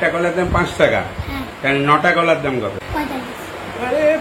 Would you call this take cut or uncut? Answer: cut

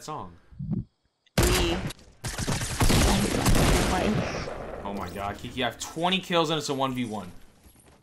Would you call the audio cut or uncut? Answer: cut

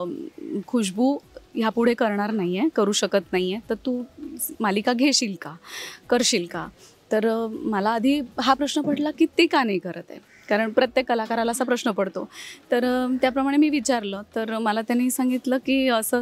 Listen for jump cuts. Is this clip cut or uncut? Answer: uncut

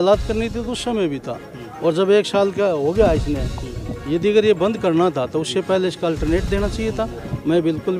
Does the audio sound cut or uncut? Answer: uncut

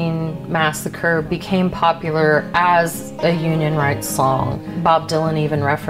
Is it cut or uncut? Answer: uncut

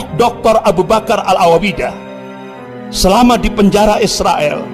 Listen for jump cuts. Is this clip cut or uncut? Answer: uncut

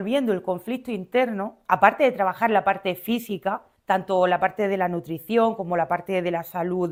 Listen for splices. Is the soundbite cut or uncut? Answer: uncut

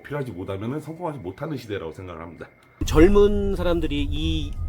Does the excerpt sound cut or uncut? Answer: cut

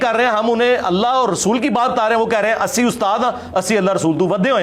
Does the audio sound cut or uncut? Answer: uncut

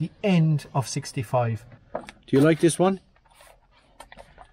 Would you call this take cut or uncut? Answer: cut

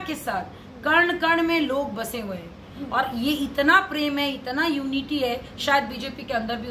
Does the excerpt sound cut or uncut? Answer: uncut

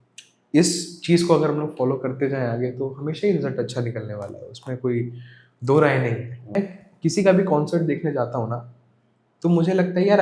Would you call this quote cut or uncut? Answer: cut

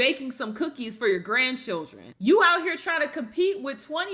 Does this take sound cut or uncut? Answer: cut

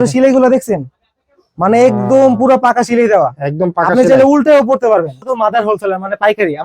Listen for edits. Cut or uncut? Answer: cut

